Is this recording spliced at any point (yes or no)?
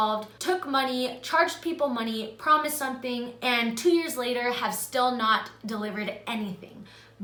no